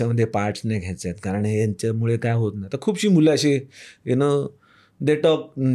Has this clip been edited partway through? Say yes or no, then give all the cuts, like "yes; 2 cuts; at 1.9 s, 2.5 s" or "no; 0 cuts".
no; 0 cuts